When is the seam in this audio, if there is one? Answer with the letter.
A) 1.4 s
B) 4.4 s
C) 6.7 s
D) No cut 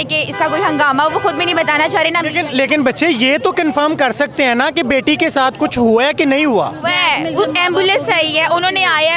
D